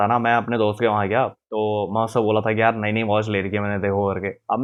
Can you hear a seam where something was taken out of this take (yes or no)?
no